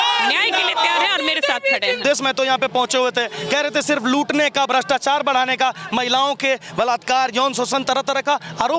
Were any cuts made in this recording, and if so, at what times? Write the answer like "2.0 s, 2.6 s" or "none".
2.0 s